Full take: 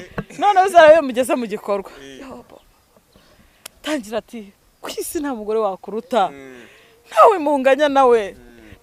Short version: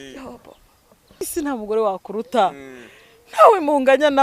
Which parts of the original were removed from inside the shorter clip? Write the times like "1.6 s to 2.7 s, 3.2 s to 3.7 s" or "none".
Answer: 3.3 s to 5.0 s